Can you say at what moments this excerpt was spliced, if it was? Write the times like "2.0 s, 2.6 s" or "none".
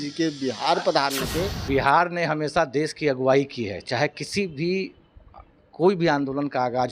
1.6 s